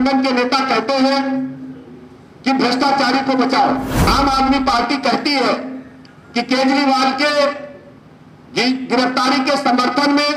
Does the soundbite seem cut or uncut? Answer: cut